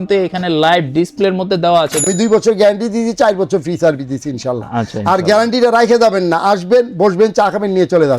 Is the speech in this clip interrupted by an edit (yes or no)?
yes